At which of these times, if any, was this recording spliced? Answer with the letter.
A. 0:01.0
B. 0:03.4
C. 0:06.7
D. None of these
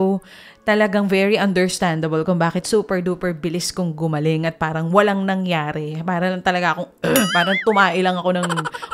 D